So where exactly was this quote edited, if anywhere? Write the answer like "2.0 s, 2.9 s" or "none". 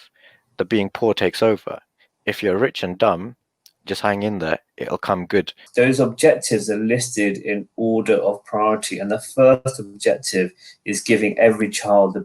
5.6 s

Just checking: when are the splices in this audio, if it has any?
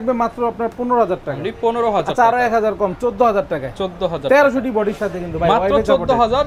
none

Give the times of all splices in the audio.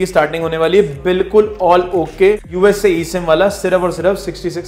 2.5 s

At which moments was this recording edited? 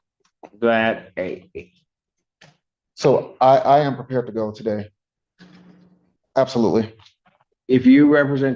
6.1 s

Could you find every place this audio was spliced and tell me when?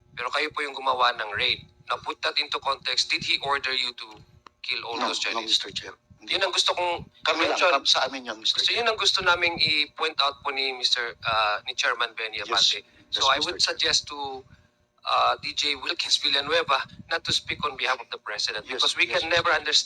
none

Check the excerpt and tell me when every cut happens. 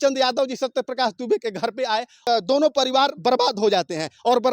2.3 s

